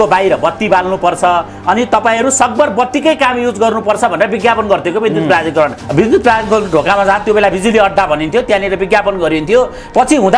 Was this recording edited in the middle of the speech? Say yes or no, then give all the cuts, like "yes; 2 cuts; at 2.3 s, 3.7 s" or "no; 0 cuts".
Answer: yes; 1 cut; at 5.8 s